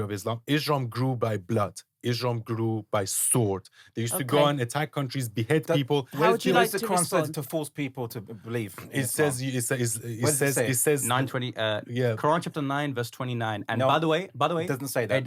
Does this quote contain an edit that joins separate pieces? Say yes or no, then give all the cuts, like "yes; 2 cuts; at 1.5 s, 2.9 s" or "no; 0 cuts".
no; 0 cuts